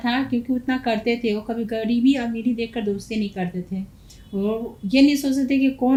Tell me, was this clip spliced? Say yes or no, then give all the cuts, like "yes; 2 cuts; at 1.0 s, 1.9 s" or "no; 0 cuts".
no; 0 cuts